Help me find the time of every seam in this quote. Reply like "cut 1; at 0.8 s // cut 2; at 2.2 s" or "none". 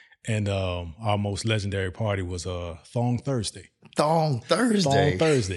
none